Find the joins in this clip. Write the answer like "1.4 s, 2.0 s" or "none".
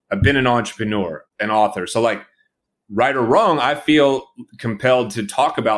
none